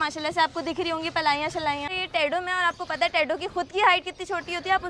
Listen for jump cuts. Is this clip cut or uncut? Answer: cut